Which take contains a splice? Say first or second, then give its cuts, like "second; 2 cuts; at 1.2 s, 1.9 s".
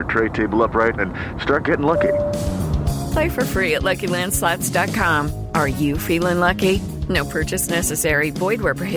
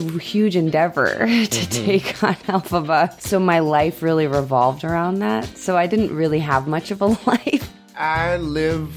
second; 2 cuts; at 3.2 s, 7.9 s